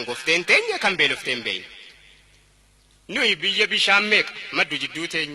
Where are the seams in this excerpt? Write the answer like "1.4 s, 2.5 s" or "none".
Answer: 3.2 s